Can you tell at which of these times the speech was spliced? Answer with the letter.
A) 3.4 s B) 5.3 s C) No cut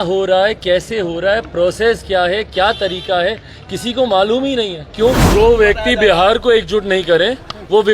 B